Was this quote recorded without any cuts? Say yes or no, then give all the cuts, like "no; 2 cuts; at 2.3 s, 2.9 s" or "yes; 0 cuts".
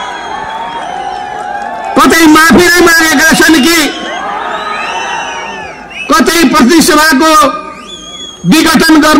yes; 0 cuts